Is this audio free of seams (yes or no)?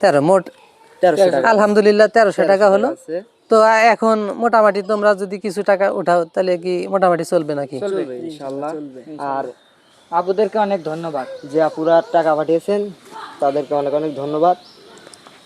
yes